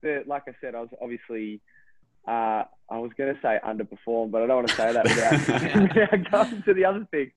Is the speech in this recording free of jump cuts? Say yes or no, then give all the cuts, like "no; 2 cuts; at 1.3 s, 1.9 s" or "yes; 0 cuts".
yes; 0 cuts